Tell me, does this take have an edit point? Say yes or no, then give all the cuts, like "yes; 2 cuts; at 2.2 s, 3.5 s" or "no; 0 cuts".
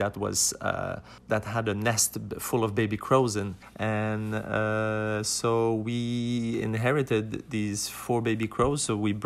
yes; 2 cuts; at 1.1 s, 3.6 s